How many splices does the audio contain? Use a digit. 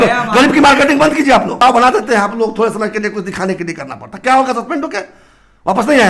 1